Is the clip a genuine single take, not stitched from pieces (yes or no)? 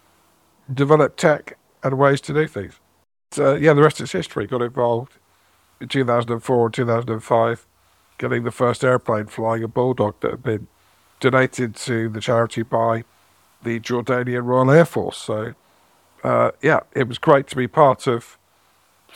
no